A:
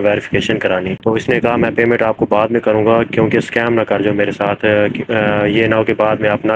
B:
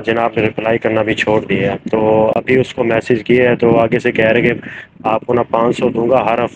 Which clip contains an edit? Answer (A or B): A